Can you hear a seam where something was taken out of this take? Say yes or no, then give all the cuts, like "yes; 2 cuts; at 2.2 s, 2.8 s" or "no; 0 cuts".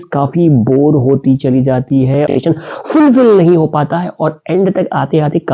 yes; 1 cut; at 2.3 s